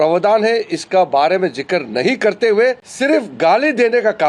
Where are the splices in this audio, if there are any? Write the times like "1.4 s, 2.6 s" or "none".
2.9 s